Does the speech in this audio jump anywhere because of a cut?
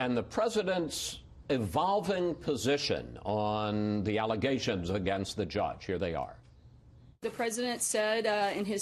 no; 0 cuts

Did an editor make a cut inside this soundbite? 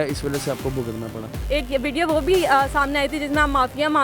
yes; 1 cut; at 1.4 s

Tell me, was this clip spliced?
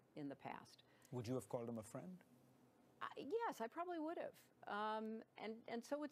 yes; 1 cut; at 3.5 s

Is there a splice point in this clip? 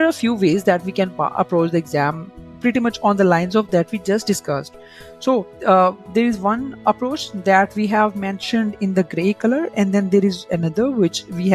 no; 0 cuts

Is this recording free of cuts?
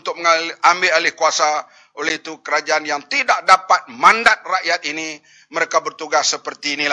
yes; 0 cuts

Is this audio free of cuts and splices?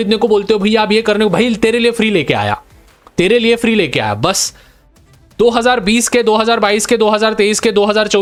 yes; 0 cuts

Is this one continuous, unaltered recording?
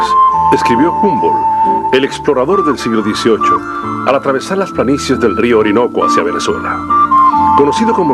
no; 1 cut; at 5.4 s

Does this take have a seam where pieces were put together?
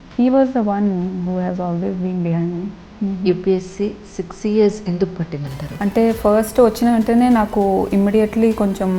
yes; 2 cuts; at 2.9 s, 5.7 s

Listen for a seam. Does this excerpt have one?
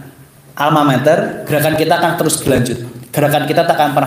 yes; 1 cut; at 1.5 s

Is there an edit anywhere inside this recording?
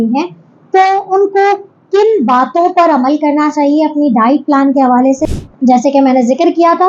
yes; 1 cut; at 5.3 s

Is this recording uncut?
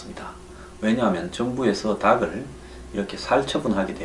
yes; 0 cuts

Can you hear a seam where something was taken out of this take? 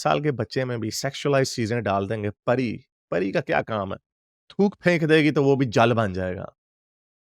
no; 0 cuts

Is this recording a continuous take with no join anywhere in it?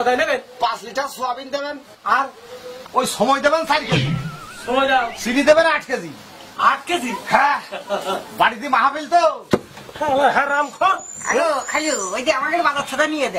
no; 1 cut; at 9.4 s

